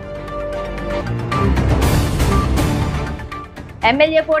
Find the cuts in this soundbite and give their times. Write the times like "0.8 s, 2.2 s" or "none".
1.0 s